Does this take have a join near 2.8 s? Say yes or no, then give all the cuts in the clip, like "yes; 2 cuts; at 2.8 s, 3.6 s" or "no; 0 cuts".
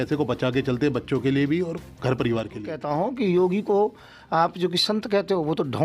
yes; 1 cut; at 2.8 s